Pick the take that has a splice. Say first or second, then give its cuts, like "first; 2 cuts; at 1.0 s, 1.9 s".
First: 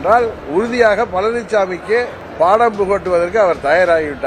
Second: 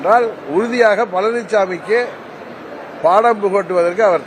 first; 1 cut; at 2.2 s